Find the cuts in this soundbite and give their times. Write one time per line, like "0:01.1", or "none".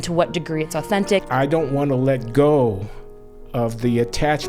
0:01.3